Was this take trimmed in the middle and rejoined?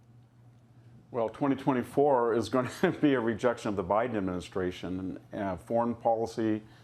no; 0 cuts

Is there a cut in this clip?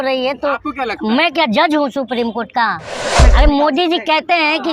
yes; 1 cut; at 3.2 s

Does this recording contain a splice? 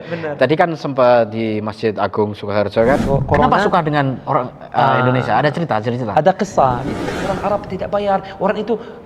yes; 2 cuts; at 3.0 s, 6.9 s

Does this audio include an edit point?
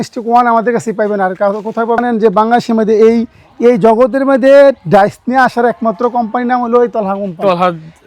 yes; 1 cut; at 2.0 s

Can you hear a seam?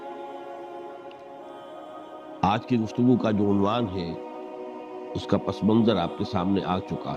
no; 0 cuts

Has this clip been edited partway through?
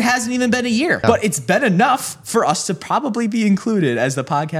yes; 1 cut; at 1.0 s

